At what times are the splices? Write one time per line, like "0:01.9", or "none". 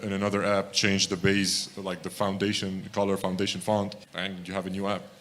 0:04.0

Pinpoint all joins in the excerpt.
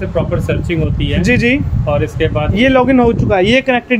0:02.5

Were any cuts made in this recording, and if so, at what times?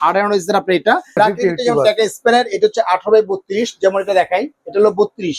0:01.2

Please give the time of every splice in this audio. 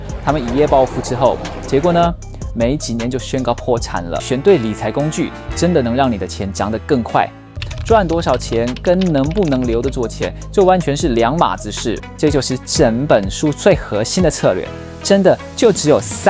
0:04.2
0:07.5
0:12.1

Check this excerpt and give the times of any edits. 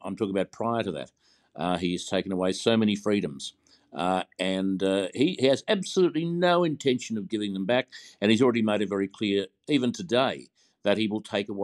none

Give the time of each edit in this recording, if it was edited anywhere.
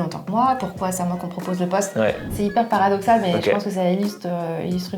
0:02.3

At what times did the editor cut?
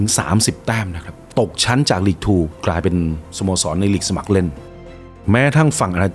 0:01.3
0:02.5
0:04.8

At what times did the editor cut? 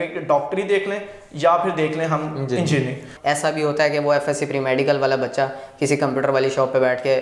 0:03.1

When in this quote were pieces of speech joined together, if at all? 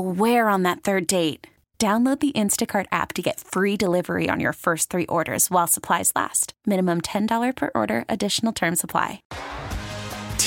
0:09.3

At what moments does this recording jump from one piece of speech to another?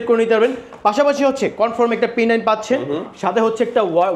none

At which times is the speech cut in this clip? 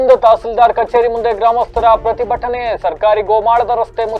none

